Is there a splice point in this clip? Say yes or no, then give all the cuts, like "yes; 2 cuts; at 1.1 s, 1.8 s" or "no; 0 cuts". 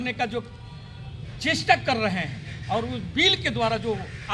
no; 0 cuts